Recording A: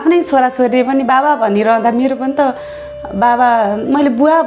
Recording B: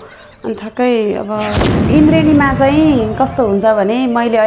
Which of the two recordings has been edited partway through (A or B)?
B